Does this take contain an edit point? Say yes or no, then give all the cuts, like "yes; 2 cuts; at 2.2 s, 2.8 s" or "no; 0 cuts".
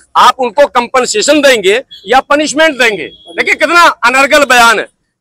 no; 0 cuts